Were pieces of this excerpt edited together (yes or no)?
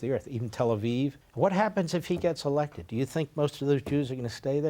yes